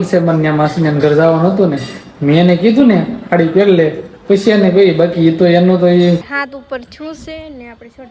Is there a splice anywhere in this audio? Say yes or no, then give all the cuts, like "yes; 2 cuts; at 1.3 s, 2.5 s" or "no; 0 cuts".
yes; 1 cut; at 5.9 s